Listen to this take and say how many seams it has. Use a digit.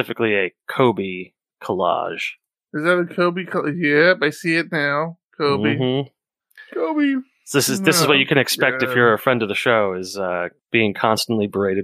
1